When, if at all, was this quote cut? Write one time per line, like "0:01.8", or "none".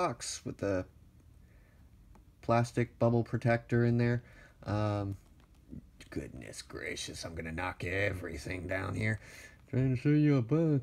0:06.7